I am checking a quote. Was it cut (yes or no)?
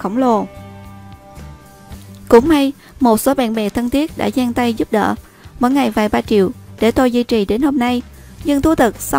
yes